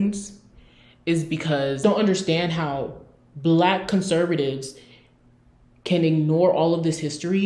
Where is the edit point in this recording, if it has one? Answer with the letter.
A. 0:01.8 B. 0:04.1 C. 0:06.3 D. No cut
A